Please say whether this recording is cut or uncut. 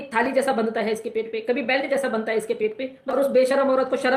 cut